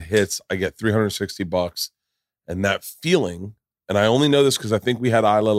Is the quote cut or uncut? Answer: uncut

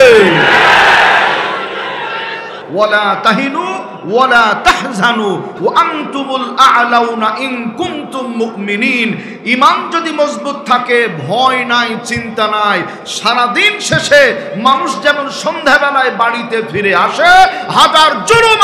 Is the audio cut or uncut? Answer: cut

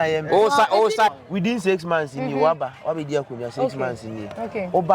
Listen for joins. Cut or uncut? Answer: cut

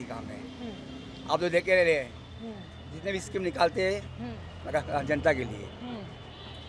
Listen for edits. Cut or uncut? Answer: uncut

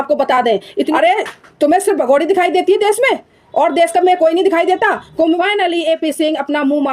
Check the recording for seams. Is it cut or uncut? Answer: cut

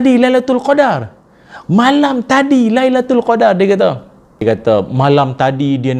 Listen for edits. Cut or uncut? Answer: cut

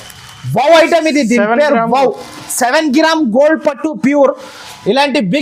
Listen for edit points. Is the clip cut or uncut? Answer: uncut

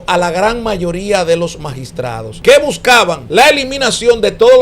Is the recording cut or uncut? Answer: cut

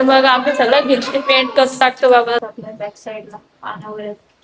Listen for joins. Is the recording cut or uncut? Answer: cut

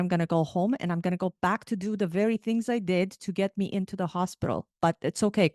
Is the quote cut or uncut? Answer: uncut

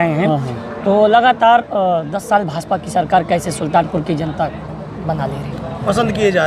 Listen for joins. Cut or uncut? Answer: uncut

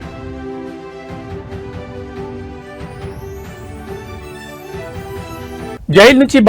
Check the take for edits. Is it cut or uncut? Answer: cut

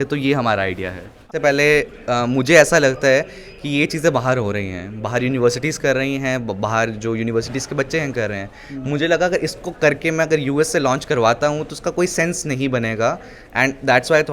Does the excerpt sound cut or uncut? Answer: cut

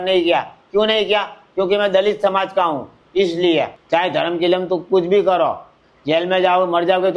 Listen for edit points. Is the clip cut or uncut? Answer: cut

